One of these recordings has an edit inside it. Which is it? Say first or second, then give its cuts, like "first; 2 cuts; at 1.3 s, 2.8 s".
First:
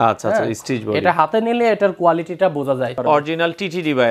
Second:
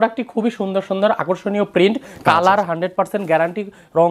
first; 1 cut; at 3.0 s